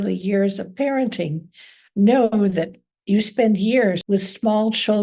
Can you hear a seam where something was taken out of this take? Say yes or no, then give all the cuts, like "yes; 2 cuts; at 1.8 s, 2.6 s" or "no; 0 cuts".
yes; 1 cut; at 4.0 s